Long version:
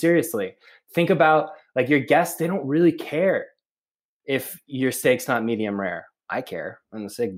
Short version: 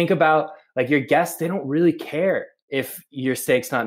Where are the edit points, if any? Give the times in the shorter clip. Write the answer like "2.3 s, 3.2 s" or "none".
2.6 s